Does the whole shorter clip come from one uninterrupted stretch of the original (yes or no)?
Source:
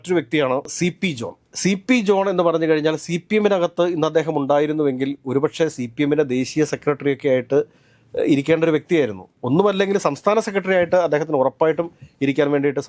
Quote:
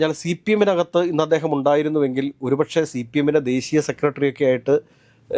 yes